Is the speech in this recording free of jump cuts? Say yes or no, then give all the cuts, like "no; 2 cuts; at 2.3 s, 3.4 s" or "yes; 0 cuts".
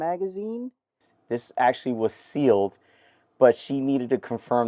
no; 1 cut; at 1.1 s